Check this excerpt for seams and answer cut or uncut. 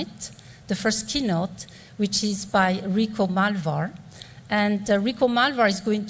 uncut